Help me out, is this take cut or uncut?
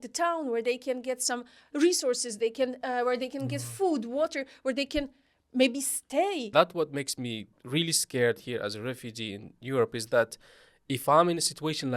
cut